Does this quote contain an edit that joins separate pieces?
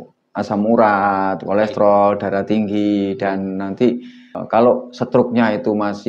no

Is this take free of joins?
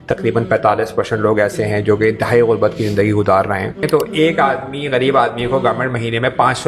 no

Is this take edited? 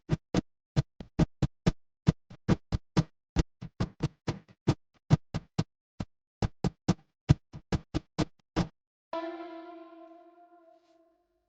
no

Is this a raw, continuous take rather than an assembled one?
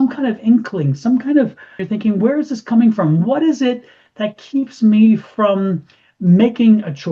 no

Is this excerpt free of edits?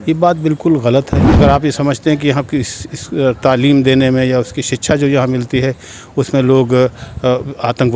no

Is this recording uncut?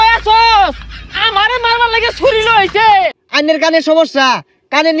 no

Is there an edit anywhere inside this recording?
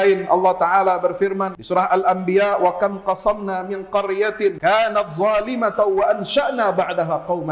yes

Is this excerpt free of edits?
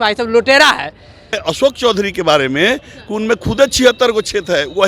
no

